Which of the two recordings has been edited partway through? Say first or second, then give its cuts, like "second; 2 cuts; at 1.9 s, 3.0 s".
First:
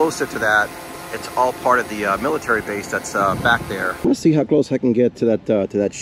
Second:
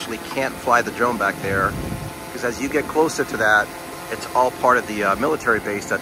first; 1 cut; at 4.0 s